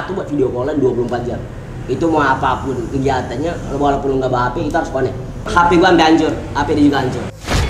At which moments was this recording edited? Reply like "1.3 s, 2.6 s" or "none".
1.5 s, 5.4 s